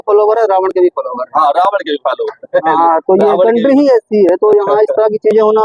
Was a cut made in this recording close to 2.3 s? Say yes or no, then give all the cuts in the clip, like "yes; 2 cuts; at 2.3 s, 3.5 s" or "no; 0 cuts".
no; 0 cuts